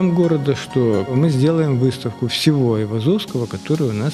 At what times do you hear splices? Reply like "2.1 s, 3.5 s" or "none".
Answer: 1.1 s